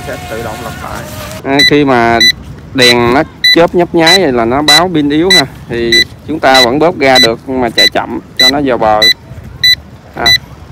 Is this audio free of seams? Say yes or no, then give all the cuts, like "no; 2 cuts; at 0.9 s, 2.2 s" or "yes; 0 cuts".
no; 1 cut; at 1.3 s